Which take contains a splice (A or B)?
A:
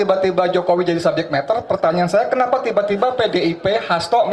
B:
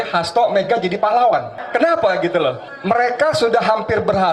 B